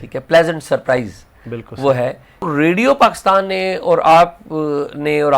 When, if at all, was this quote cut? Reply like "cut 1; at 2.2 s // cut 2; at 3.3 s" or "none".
cut 1; at 2.5 s